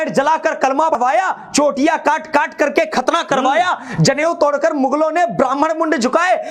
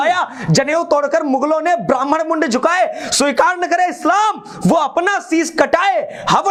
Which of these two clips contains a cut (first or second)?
first